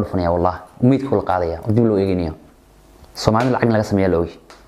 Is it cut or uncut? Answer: uncut